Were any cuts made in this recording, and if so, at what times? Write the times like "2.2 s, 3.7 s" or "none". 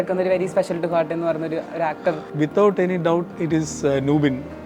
2.3 s, 3.3 s